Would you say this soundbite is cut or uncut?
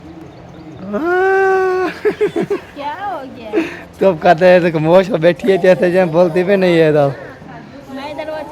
uncut